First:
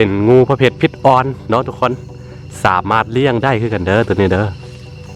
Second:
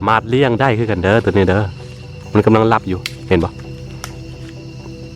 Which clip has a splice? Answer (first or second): second